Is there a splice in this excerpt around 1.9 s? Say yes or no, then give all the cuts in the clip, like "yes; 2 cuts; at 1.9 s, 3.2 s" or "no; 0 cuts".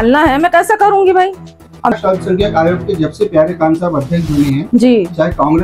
yes; 1 cut; at 1.9 s